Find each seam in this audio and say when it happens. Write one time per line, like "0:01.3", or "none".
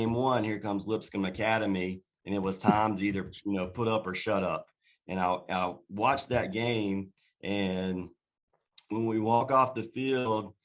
none